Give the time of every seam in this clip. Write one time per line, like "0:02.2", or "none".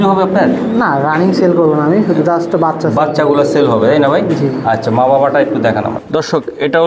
none